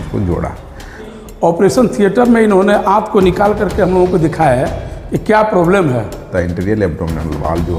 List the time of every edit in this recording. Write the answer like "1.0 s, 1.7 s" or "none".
1.1 s, 6.3 s